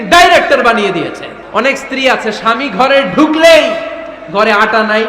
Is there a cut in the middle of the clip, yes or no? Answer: yes